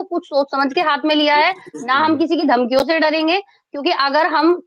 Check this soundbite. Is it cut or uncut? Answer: uncut